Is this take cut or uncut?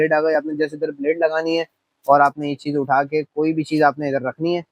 uncut